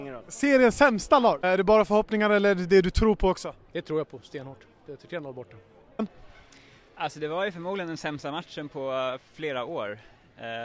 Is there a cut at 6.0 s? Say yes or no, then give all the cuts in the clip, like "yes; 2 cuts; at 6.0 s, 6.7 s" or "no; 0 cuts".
yes; 2 cuts; at 1.4 s, 6.0 s